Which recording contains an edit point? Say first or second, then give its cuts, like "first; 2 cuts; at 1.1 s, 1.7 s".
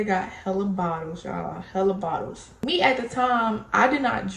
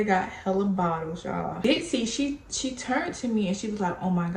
second; 1 cut; at 1.5 s